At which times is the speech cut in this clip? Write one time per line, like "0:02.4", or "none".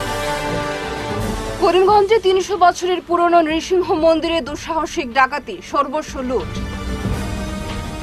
0:01.0